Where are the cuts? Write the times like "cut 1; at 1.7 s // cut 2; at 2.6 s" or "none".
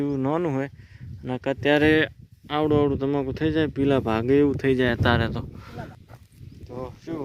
cut 1; at 5.9 s